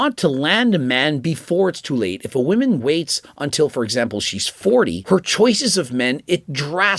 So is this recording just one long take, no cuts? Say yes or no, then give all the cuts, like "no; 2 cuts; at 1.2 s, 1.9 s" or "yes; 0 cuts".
no; 1 cut; at 5.0 s